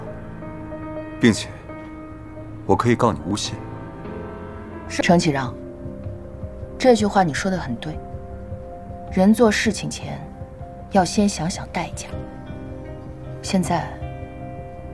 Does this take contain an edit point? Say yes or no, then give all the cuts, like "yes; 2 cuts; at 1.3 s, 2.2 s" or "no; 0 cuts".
yes; 1 cut; at 5.0 s